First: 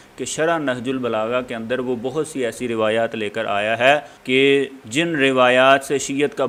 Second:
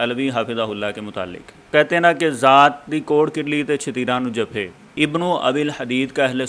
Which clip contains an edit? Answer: second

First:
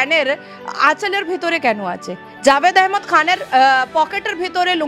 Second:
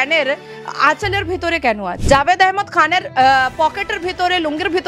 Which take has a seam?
second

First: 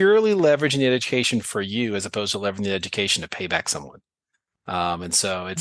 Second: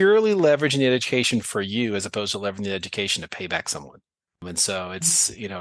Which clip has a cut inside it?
second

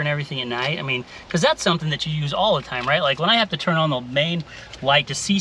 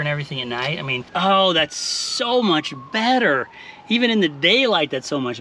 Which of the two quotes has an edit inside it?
second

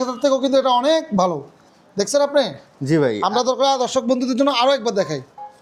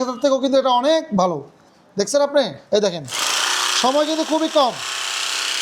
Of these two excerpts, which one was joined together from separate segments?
second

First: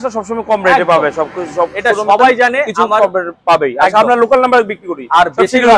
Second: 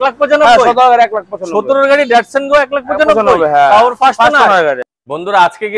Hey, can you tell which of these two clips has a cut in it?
second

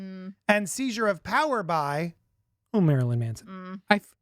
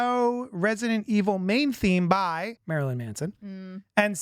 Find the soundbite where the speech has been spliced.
second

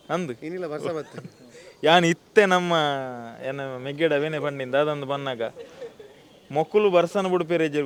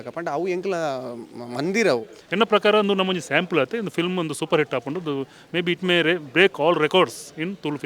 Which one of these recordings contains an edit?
second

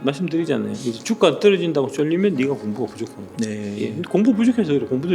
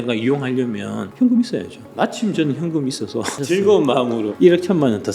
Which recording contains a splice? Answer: second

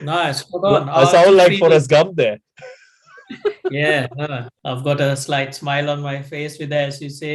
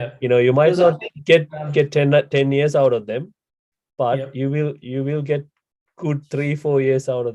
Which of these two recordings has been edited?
first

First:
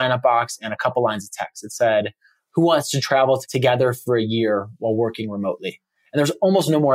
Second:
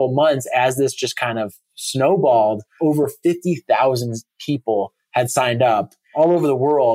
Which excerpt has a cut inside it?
second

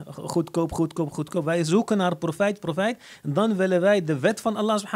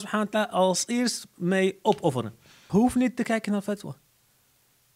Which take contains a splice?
second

